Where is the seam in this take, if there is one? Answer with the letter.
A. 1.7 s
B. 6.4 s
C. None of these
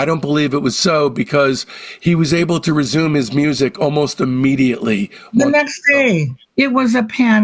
B